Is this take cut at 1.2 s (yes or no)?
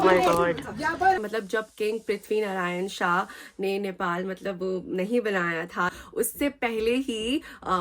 yes